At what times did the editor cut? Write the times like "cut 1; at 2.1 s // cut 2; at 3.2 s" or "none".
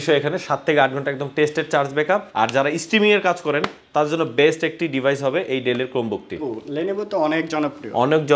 cut 1; at 2.3 s // cut 2; at 6.4 s